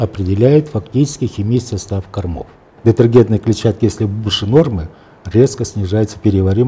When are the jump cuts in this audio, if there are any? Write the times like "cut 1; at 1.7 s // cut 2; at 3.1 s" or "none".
cut 1; at 2.7 s